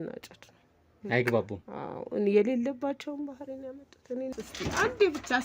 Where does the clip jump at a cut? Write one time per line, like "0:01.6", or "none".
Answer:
0:04.3